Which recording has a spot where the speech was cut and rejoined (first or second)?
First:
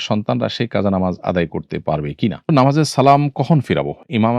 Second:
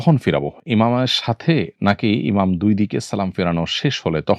first